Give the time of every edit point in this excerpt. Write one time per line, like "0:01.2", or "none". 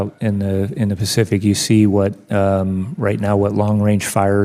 none

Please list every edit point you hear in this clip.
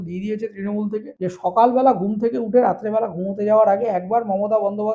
0:01.1

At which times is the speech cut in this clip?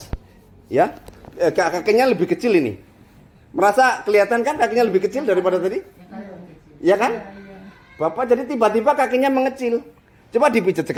none

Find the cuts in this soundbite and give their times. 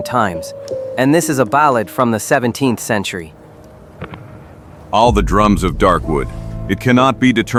none

